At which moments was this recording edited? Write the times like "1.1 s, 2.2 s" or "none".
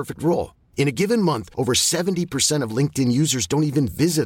none